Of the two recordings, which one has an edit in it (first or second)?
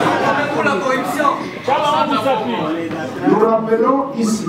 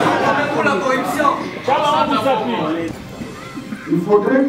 second